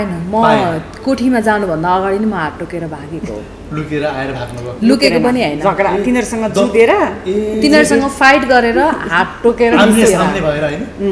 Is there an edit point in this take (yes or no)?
no